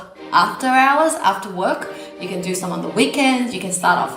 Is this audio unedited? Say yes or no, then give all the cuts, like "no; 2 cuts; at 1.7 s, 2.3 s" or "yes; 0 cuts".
yes; 0 cuts